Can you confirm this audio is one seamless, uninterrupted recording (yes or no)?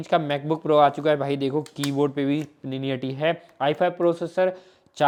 yes